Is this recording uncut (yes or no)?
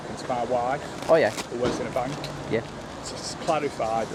yes